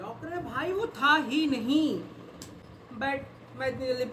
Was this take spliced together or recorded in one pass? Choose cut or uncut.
uncut